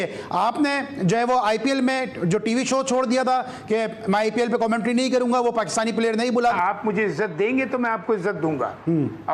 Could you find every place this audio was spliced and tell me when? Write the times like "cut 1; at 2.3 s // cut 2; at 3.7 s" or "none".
cut 1; at 6.5 s